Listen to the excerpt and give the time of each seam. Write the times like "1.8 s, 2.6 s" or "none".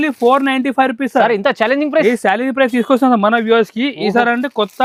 none